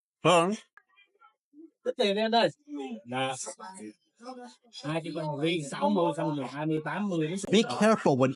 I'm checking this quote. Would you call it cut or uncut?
uncut